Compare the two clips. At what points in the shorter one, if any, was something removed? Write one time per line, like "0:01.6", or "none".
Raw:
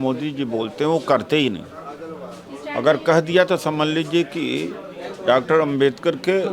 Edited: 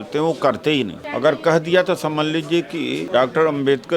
0:01.0
0:03.0